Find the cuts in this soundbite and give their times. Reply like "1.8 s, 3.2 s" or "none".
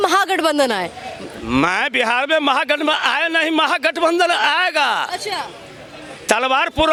none